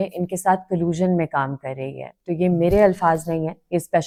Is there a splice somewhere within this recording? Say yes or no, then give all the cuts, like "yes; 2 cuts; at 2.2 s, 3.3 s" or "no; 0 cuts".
no; 0 cuts